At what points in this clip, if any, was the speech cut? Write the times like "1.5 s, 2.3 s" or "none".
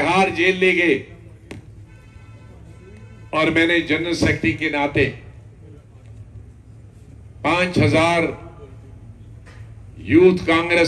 none

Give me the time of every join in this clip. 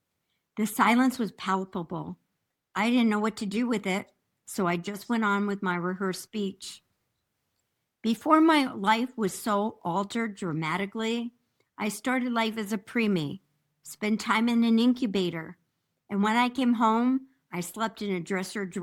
none

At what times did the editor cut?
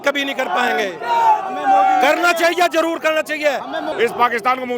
3.9 s

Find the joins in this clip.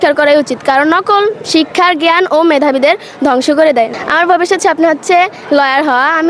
3.9 s

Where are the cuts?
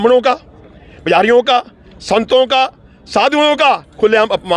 none

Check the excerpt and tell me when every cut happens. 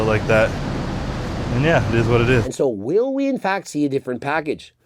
2.5 s

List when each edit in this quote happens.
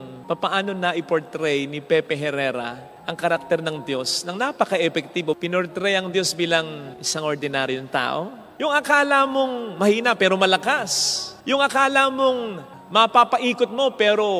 5.4 s, 8.4 s

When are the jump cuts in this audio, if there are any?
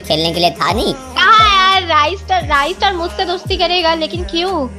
none

